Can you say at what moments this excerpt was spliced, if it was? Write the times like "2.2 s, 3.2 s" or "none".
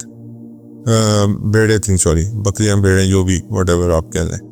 none